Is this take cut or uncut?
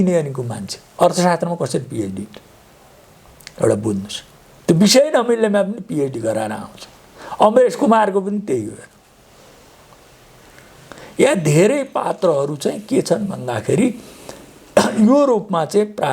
uncut